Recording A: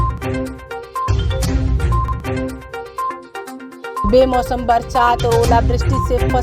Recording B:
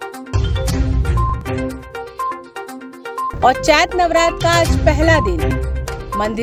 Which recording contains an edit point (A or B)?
A